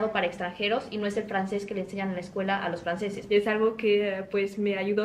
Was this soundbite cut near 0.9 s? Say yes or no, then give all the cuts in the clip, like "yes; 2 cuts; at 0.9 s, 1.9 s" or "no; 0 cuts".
no; 1 cut; at 3.2 s